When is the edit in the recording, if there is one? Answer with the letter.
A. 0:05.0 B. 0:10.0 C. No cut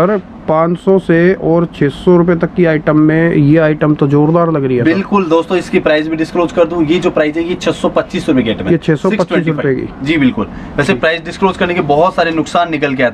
C